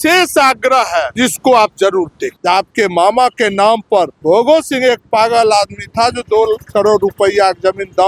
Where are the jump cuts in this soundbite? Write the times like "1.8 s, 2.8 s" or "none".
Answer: 1.1 s, 2.2 s, 4.1 s